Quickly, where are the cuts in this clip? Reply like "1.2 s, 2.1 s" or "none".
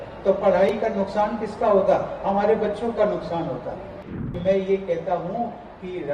4.0 s